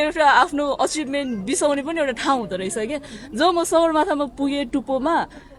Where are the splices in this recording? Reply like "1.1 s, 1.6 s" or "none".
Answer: none